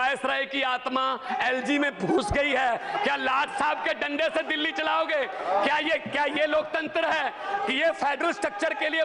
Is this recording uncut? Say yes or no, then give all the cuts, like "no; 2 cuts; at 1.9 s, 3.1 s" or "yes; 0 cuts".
yes; 0 cuts